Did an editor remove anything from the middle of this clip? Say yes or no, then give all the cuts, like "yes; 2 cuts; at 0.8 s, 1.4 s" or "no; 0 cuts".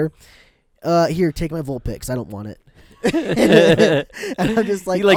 no; 0 cuts